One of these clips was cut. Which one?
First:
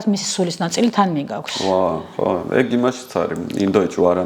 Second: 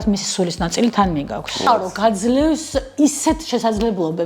second; 1 cut; at 1.6 s

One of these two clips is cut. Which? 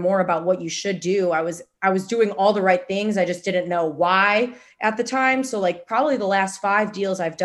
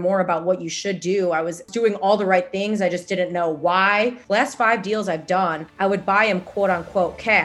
second; 3 cuts; at 1.7 s, 4.2 s, 5.6 s

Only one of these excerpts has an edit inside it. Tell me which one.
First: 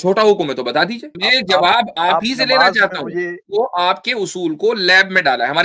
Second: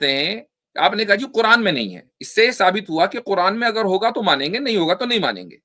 first; 2 cuts; at 1.1 s, 3.4 s

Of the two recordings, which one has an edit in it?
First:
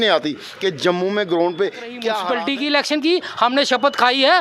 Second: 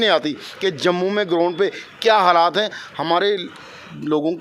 first; 1 cut; at 2.2 s

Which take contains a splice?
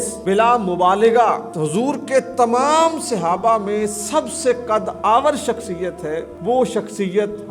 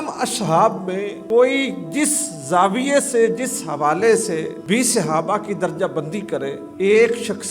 second; 3 cuts; at 1.1 s, 4.5 s, 6.6 s

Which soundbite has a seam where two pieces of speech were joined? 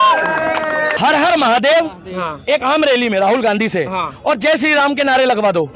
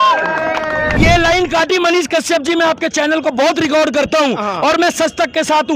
second; 1 cut; at 1.0 s

